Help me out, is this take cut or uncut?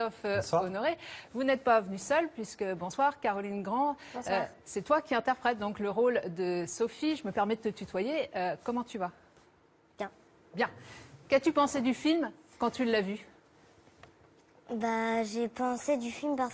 uncut